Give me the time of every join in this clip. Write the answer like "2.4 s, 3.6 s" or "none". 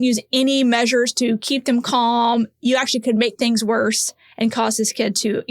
none